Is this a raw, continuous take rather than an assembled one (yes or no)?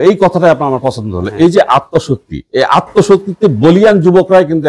yes